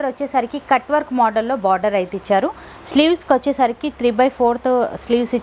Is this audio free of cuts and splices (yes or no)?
yes